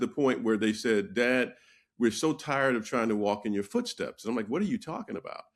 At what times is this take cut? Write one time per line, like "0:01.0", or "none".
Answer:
none